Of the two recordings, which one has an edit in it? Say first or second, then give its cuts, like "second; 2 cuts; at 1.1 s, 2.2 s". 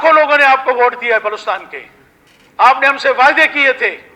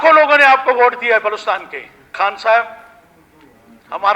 second; 1 cut; at 2.1 s